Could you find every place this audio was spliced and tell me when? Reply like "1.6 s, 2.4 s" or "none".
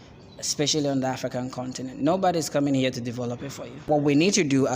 3.7 s